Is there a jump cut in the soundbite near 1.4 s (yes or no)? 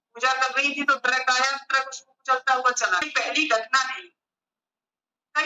no